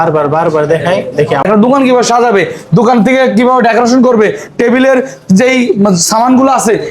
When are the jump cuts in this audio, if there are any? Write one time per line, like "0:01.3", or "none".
0:01.4